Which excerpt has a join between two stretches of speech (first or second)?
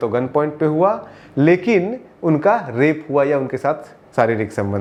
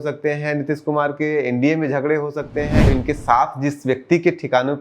second